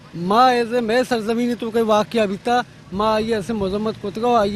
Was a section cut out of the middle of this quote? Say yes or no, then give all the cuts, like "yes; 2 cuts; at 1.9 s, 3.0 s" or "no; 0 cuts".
no; 0 cuts